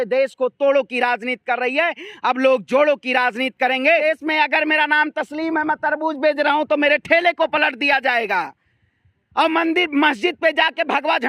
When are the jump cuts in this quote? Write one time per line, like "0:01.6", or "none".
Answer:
0:04.0